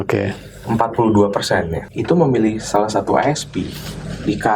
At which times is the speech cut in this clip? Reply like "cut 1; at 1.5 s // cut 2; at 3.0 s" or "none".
cut 1; at 1.8 s